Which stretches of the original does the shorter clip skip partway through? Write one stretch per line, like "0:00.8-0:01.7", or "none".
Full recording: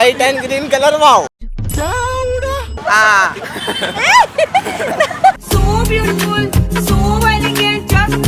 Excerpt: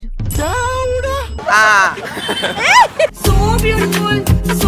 0:04.5-0:05.4